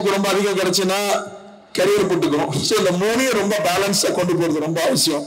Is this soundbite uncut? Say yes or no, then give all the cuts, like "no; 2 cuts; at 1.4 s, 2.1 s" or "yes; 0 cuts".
yes; 0 cuts